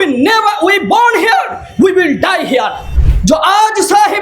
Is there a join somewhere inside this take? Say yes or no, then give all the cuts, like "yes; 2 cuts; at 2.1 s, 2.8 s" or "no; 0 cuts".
yes; 1 cut; at 2.9 s